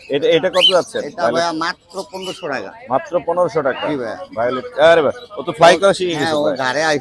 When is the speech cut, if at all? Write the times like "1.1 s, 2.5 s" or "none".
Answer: none